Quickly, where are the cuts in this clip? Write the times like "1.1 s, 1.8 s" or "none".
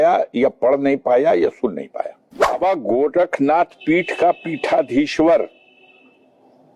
2.6 s